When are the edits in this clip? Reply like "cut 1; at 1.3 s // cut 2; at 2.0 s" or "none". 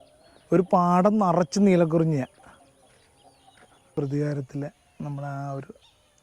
cut 1; at 3.9 s